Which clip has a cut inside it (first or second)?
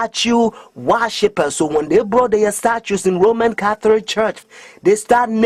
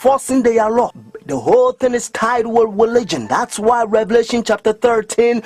second